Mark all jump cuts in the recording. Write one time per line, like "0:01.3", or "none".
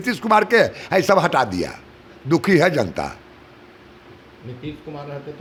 none